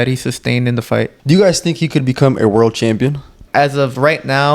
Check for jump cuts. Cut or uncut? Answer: cut